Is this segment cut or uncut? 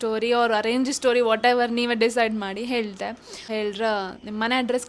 cut